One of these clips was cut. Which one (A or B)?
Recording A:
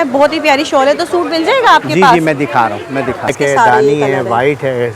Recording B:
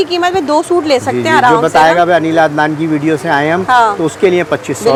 A